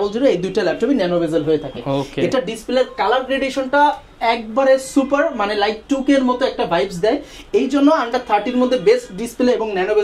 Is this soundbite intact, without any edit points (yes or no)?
yes